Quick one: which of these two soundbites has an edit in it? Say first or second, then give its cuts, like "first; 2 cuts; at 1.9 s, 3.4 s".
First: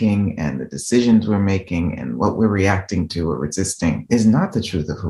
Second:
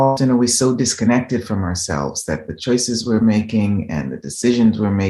first; 1 cut; at 4.0 s